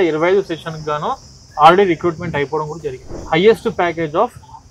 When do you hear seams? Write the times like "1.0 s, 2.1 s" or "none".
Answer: 3.1 s